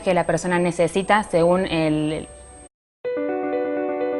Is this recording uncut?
yes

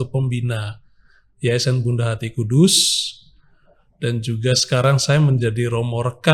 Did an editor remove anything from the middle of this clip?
no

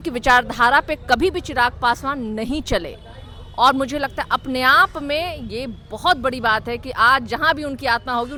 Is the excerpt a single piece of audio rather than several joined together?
yes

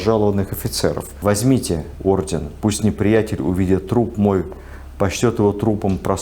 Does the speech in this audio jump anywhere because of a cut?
yes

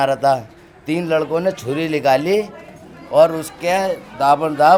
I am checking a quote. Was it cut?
no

